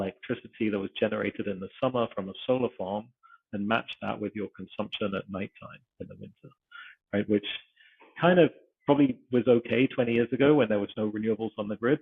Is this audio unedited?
yes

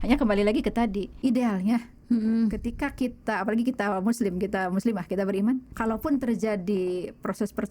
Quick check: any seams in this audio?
yes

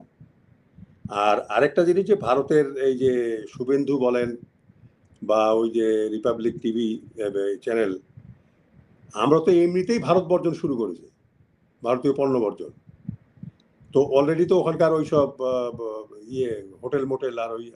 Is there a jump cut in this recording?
no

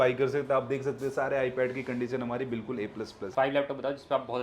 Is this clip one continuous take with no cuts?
no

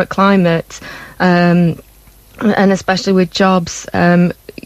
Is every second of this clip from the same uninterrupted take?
yes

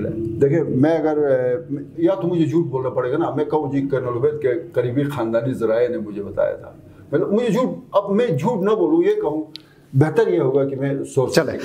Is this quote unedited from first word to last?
yes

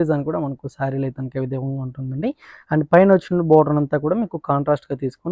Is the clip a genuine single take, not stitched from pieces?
yes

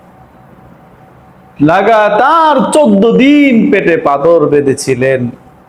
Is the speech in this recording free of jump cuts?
yes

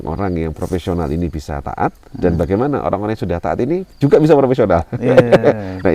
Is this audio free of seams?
yes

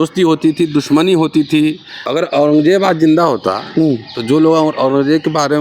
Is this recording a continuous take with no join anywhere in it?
no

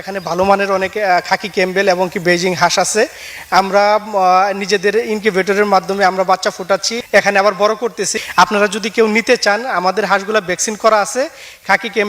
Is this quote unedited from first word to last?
no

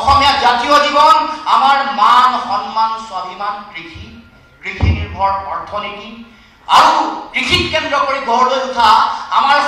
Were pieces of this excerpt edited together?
no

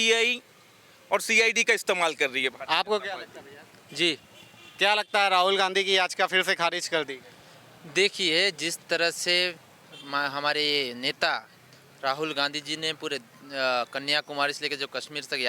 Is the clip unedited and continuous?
yes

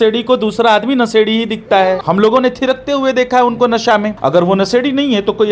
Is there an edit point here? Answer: yes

